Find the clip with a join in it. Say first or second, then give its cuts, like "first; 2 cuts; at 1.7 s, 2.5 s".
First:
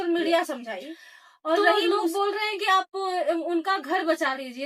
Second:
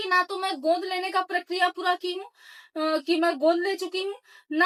first; 1 cut; at 1.8 s